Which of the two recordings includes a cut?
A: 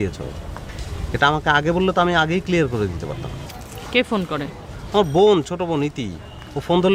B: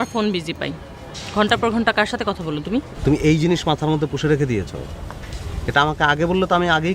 B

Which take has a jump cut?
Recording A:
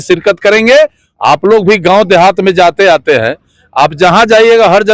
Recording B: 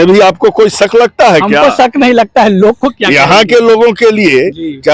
A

